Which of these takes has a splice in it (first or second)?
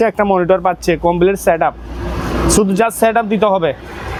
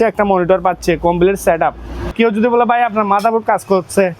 second